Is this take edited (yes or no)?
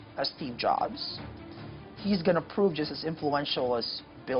no